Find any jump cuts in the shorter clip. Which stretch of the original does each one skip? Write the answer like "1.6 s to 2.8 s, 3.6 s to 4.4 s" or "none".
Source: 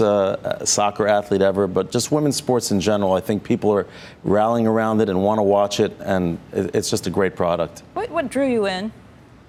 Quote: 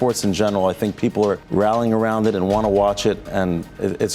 3.9 s to 4.2 s